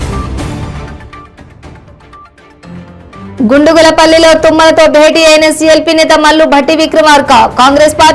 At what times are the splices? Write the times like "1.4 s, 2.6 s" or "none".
none